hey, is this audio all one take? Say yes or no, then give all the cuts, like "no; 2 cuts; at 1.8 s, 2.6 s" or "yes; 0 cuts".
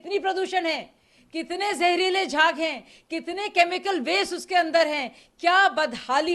yes; 0 cuts